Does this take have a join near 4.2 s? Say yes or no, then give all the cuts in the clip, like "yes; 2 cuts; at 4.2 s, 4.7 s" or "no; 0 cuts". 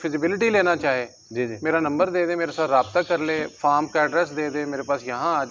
no; 0 cuts